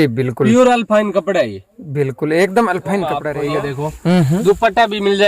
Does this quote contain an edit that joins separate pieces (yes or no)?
yes